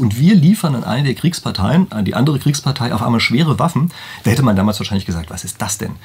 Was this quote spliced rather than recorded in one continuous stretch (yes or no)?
no